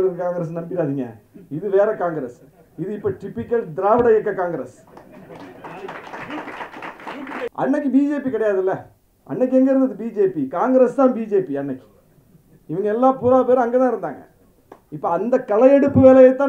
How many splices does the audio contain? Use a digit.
1